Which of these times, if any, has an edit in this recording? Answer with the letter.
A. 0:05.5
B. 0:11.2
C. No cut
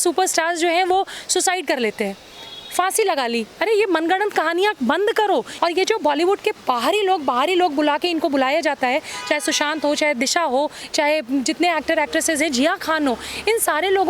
A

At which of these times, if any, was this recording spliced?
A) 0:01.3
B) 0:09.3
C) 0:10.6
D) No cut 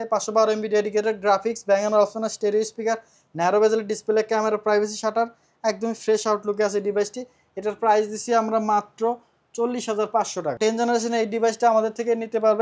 C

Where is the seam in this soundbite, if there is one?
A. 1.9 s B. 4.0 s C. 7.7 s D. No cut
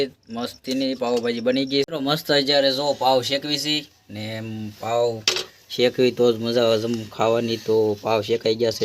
A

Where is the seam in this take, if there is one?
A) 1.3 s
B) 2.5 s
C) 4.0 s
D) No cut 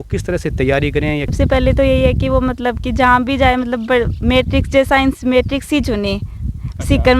A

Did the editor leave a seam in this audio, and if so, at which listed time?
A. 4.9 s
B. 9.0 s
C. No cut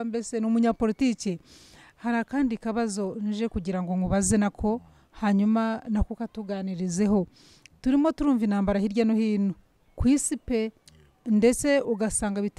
C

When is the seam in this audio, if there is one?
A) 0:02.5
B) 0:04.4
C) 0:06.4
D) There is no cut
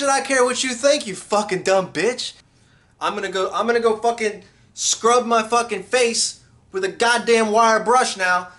A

